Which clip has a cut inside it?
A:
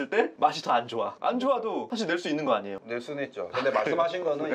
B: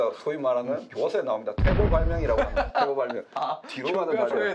A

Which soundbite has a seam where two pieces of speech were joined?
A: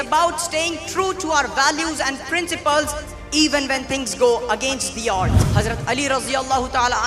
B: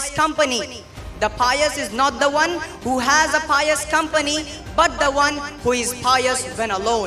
A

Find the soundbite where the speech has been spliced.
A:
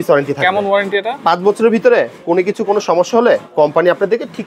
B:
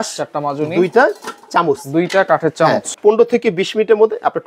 B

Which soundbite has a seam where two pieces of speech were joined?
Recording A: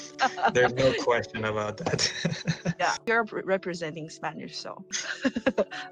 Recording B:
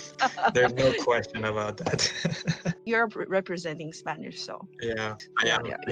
B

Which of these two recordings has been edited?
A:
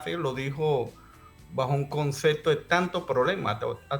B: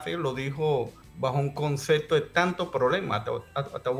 B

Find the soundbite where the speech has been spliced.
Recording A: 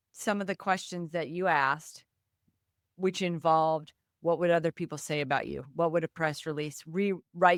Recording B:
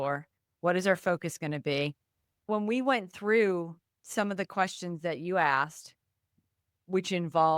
B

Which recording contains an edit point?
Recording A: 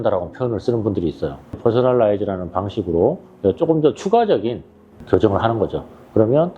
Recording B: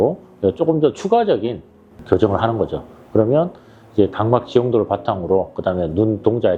A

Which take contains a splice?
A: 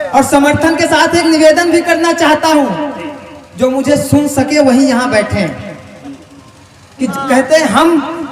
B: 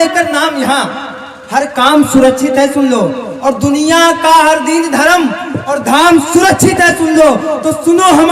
A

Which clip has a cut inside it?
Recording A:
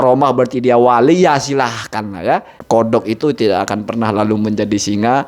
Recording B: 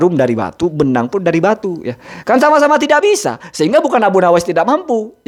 A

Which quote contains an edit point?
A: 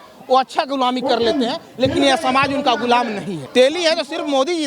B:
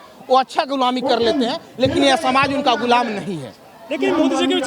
A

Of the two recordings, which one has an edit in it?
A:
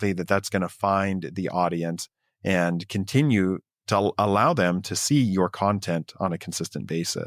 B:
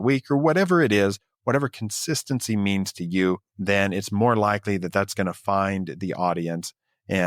B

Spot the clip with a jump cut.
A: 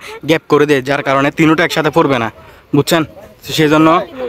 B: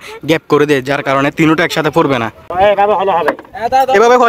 B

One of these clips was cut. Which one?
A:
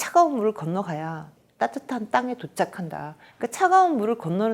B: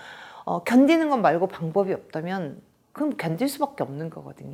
A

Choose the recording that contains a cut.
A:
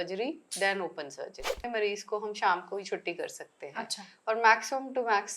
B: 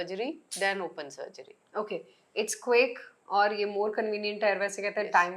A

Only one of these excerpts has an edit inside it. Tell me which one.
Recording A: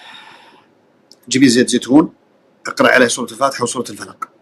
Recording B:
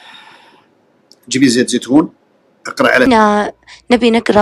B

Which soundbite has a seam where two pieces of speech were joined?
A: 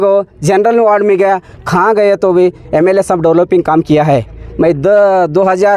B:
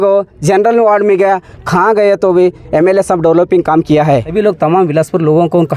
B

